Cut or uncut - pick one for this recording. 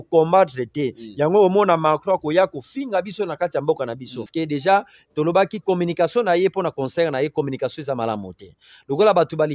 cut